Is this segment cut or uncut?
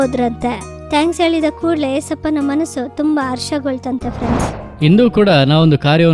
cut